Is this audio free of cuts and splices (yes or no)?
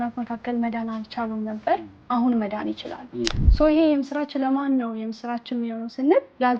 no